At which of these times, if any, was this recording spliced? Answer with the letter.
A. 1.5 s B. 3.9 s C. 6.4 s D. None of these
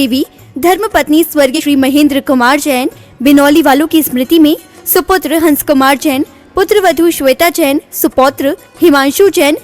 A